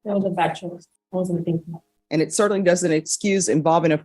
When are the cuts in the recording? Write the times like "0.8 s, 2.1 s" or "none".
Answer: 0.9 s, 1.9 s